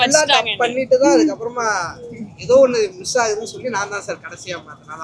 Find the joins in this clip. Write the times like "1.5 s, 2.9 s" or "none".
none